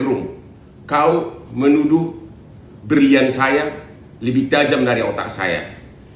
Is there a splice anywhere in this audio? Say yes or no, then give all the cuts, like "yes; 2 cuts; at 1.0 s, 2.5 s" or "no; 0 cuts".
yes; 1 cut; at 1.1 s